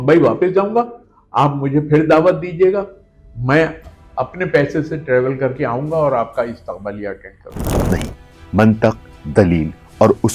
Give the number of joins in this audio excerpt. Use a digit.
1